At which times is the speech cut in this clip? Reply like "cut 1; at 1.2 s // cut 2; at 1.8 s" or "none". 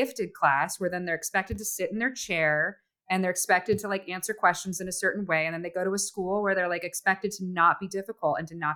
none